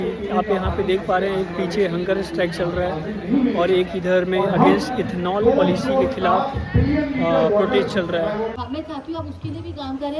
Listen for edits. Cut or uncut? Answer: cut